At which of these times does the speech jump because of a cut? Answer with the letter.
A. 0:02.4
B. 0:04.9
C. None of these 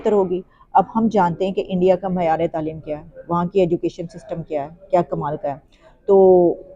C